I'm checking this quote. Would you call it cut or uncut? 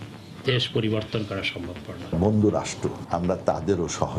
cut